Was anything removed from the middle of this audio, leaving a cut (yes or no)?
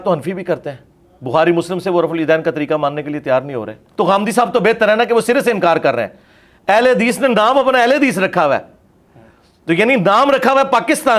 yes